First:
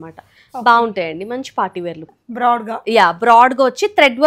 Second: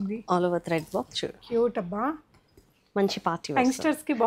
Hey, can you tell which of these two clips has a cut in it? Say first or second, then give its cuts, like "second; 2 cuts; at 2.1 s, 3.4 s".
first; 1 cut; at 2.2 s